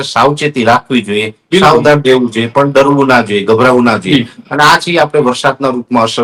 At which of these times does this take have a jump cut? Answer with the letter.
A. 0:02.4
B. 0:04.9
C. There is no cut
C